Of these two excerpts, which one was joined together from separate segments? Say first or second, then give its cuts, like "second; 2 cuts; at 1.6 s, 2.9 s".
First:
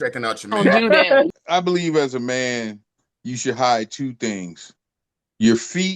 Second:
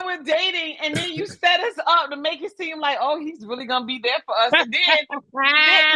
first; 1 cut; at 1.3 s